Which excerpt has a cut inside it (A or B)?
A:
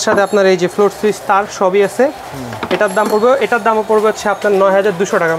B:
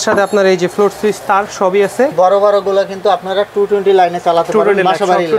B